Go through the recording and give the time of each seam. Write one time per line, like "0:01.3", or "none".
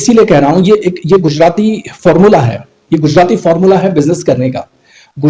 none